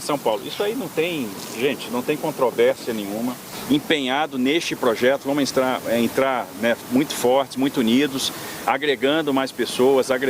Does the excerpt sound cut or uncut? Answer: cut